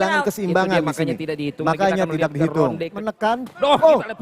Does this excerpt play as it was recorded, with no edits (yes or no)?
no